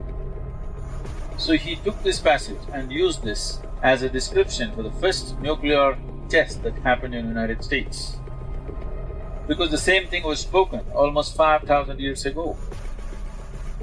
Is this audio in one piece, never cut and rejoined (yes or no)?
no